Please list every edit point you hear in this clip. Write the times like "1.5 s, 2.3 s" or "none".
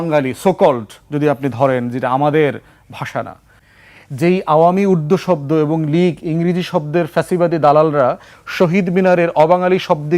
3.6 s

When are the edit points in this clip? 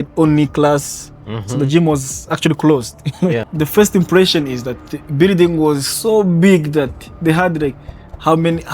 3.5 s

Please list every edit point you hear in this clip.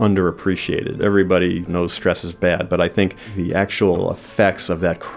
1.0 s, 1.7 s, 3.3 s, 4.0 s

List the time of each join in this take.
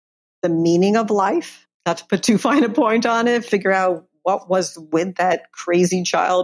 1.6 s

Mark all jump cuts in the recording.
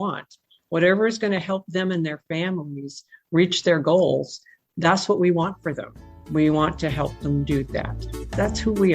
8.0 s

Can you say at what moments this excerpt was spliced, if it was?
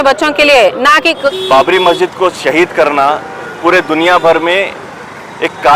1.3 s

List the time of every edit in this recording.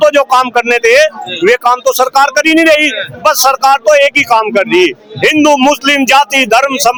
none

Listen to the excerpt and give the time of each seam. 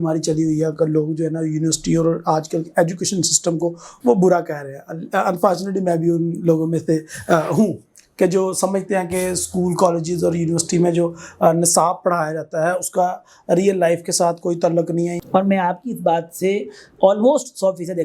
15.2 s

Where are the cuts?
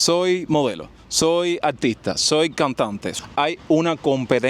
3.1 s

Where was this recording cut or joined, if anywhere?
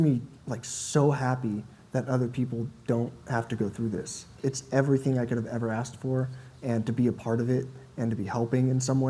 4.3 s

